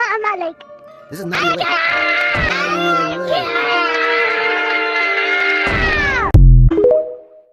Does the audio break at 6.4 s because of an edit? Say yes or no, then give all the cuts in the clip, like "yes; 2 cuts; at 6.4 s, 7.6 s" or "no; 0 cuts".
yes; 1 cut; at 6.4 s